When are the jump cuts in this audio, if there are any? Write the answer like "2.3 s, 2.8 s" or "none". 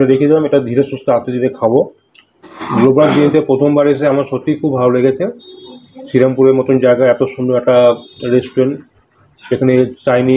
2.6 s